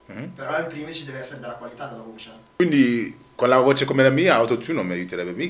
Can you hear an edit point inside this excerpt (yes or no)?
yes